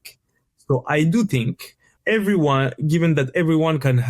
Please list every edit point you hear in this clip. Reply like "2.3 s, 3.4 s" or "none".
1.9 s